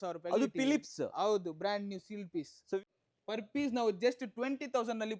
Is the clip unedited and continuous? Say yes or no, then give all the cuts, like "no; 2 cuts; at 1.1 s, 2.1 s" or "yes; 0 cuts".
no; 1 cut; at 2.8 s